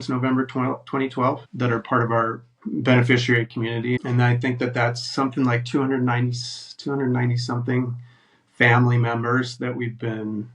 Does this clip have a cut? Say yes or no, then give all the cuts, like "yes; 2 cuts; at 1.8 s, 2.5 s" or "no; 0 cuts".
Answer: yes; 3 cuts; at 1.5 s, 2.5 s, 4.0 s